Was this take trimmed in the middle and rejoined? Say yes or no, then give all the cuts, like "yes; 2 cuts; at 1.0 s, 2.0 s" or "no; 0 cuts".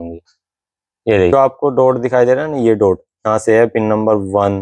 yes; 1 cut; at 1.3 s